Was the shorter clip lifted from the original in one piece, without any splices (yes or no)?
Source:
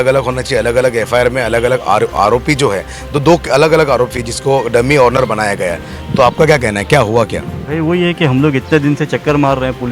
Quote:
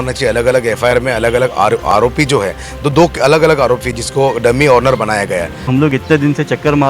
no